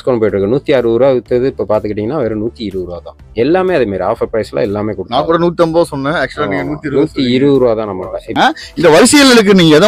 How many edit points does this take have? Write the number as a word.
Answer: one